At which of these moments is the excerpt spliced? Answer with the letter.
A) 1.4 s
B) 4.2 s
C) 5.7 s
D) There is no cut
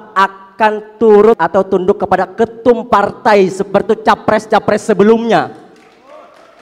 A